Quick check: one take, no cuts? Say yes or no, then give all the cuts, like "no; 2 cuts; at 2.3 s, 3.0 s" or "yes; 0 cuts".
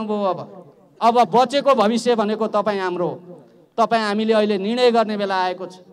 yes; 0 cuts